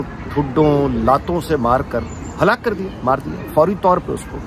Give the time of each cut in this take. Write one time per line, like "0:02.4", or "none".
none